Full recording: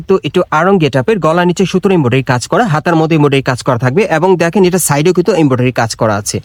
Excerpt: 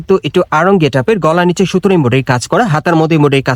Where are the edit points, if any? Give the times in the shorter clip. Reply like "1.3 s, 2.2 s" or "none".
none